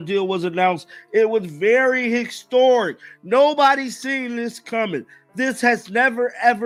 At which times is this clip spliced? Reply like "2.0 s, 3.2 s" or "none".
none